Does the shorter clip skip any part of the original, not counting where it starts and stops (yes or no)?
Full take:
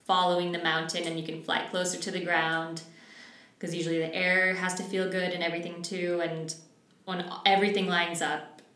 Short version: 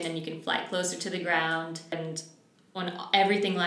yes